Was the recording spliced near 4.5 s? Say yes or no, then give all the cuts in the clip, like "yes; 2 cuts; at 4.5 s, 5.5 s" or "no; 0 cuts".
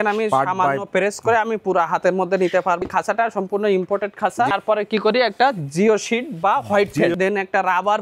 yes; 3 cuts; at 2.8 s, 4.5 s, 7.1 s